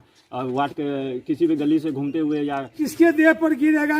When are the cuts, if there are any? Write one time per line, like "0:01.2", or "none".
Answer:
0:02.7